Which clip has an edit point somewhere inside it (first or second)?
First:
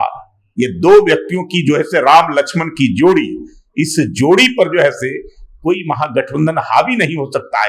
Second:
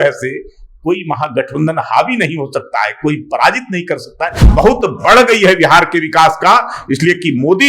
second